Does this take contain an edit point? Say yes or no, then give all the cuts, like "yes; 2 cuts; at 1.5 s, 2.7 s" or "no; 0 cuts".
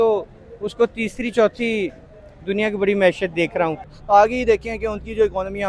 yes; 1 cut; at 3.9 s